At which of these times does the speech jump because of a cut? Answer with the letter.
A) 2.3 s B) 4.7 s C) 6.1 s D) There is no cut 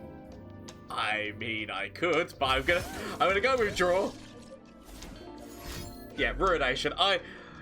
C